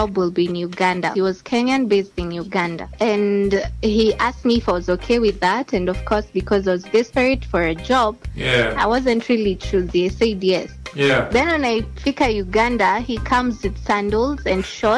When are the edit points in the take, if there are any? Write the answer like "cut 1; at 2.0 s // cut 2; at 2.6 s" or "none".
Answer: cut 1; at 1.1 s // cut 2; at 2.8 s // cut 3; at 10.8 s